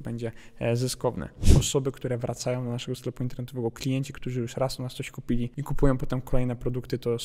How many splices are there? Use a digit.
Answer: 1